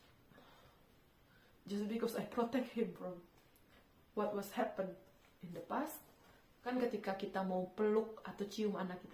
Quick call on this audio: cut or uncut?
cut